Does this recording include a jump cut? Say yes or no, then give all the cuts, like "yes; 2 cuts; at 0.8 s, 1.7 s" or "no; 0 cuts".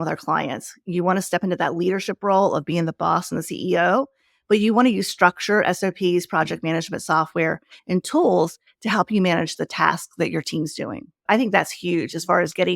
yes; 1 cut; at 11.2 s